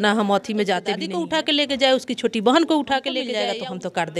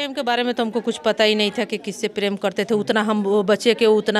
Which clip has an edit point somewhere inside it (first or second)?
first